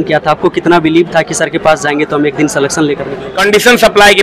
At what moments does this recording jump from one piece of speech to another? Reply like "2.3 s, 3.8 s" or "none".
3.2 s